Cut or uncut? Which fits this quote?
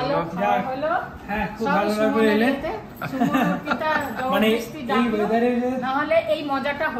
uncut